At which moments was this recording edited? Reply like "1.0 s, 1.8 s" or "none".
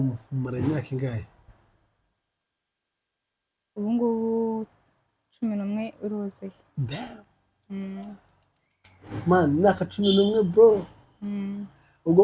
none